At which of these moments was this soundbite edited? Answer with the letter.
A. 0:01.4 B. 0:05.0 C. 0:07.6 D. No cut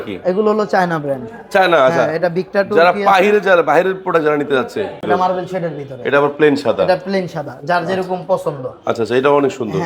B